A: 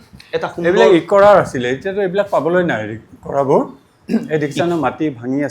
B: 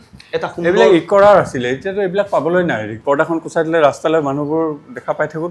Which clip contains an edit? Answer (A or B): B